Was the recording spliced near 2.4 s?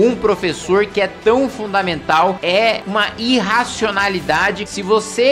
yes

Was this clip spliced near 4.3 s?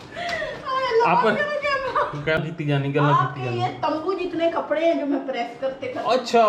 no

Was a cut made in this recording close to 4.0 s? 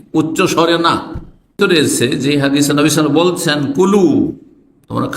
no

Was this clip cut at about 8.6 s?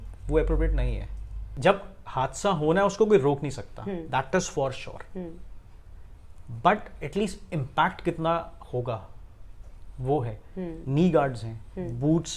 no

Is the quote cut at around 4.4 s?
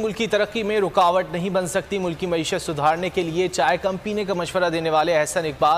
no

